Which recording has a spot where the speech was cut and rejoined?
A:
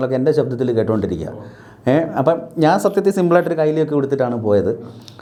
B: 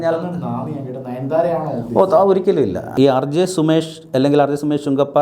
B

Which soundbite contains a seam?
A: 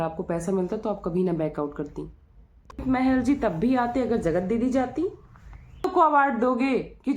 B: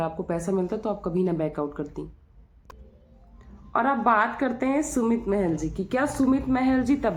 A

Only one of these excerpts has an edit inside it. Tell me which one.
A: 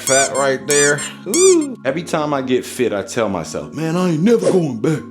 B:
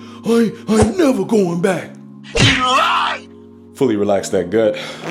A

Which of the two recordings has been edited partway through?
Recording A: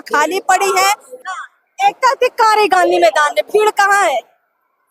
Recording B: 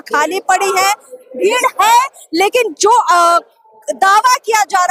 A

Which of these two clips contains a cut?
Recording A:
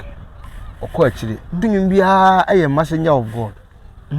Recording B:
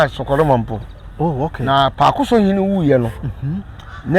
A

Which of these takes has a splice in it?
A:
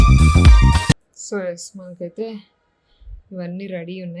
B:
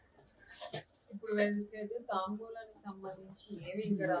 A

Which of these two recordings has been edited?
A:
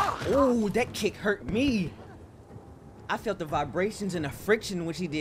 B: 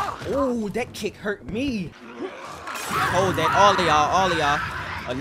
B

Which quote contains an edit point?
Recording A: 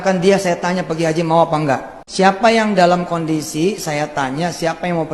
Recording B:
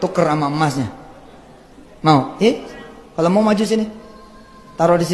A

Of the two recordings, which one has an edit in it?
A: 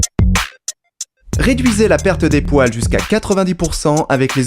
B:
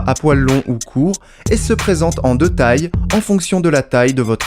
A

